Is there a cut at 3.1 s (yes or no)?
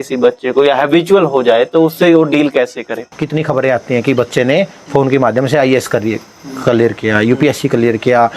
yes